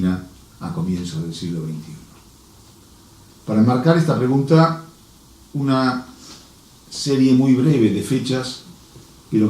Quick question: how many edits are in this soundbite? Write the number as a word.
one